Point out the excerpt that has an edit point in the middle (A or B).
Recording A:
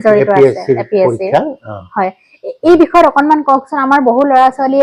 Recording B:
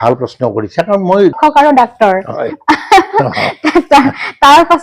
B